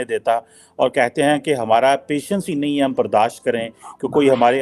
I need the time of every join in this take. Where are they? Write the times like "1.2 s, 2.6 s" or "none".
none